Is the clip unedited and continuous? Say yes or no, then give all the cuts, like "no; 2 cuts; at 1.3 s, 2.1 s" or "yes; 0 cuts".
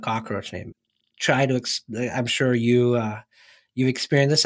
no; 1 cut; at 0.9 s